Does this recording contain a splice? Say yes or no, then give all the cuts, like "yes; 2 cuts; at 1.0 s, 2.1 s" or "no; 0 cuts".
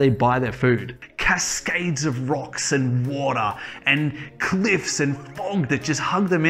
yes; 1 cut; at 1.0 s